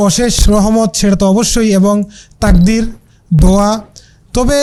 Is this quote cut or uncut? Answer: uncut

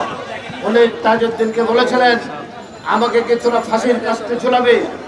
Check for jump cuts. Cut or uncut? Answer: uncut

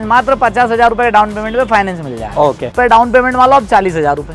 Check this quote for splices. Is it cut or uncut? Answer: cut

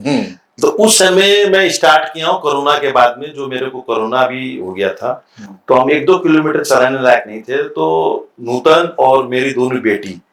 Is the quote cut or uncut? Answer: uncut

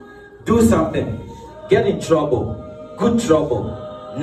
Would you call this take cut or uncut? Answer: uncut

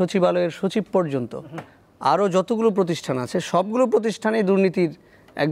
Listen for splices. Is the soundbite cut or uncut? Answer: uncut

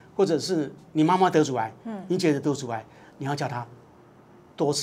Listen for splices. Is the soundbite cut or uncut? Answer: uncut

